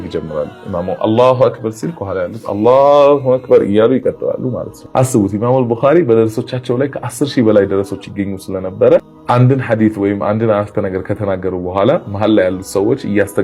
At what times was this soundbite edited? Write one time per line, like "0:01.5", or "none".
none